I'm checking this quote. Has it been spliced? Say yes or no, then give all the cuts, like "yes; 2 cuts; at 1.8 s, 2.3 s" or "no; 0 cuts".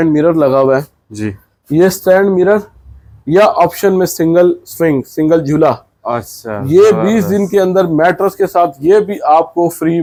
no; 0 cuts